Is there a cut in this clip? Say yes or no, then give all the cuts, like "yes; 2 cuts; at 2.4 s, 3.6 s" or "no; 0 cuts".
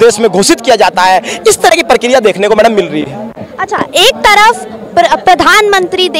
no; 0 cuts